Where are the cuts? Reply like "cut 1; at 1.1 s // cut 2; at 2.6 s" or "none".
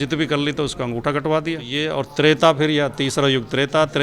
cut 1; at 1.9 s